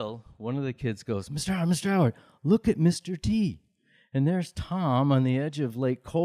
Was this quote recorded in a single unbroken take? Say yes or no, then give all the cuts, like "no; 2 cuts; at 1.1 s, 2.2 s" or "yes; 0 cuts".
no; 1 cut; at 3.9 s